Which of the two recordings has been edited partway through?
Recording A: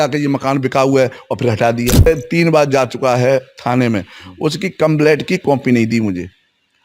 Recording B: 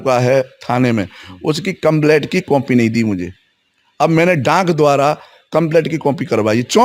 A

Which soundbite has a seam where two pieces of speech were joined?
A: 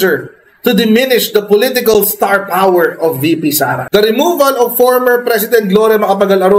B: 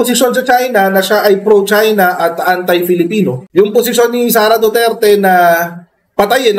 A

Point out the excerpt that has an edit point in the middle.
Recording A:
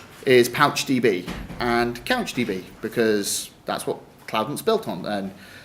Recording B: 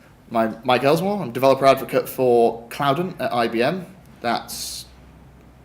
B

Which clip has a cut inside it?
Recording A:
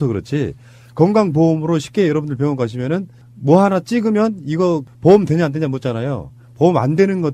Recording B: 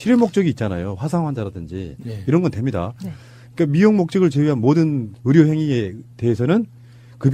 B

